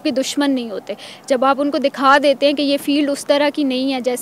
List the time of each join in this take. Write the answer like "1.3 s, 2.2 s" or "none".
none